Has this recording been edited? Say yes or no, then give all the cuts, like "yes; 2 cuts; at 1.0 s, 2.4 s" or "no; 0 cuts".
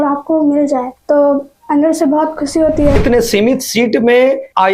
yes; 1 cut; at 3.0 s